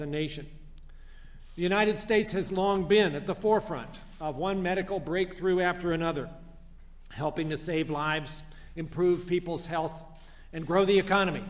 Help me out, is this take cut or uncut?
cut